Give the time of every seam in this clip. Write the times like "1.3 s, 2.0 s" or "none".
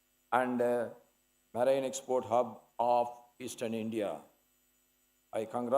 none

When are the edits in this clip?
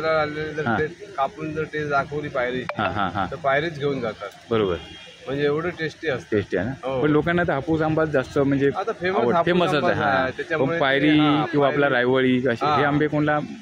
none

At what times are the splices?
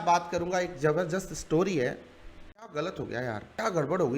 2.7 s

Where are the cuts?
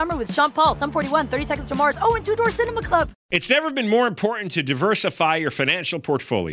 3.2 s

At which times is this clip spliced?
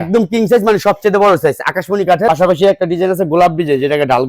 2.3 s

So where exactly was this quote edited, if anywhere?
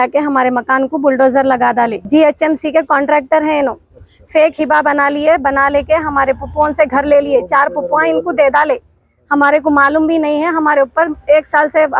2.0 s

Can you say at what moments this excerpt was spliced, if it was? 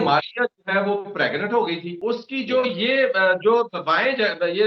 1.9 s

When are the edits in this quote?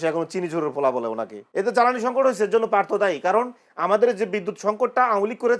1.4 s

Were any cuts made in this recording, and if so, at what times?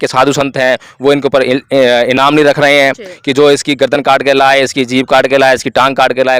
none

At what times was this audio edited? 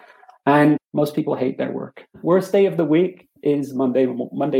0.9 s, 2.0 s

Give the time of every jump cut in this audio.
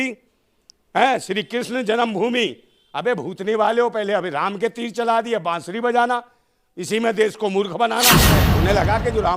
8.3 s

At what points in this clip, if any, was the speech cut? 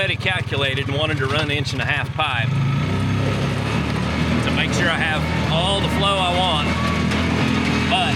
none

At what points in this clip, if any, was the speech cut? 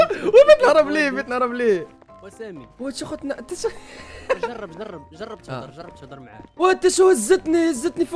1.9 s, 6.4 s

